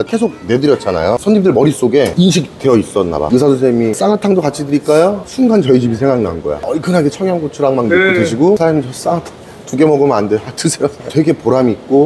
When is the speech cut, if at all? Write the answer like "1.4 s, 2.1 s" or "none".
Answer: 1.2 s, 3.3 s, 6.6 s, 11.1 s